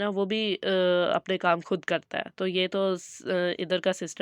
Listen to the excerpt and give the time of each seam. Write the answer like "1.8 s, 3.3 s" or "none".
none